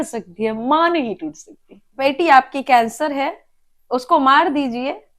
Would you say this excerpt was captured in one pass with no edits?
no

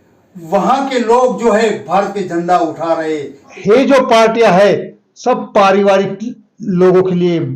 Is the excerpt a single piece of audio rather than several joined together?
no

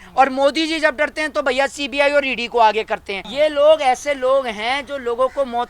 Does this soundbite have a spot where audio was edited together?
yes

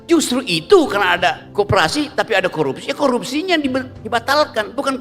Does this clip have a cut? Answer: yes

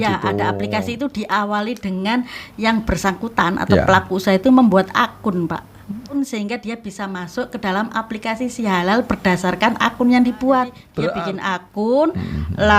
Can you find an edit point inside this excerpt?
yes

